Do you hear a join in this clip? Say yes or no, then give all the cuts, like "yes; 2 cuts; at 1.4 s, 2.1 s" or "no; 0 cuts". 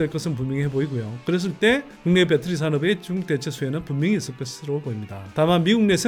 no; 0 cuts